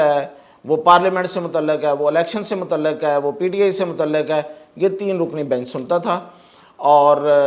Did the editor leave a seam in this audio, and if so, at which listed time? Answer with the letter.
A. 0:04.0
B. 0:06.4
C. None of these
C